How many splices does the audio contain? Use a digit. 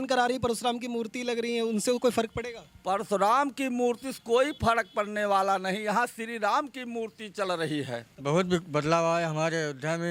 1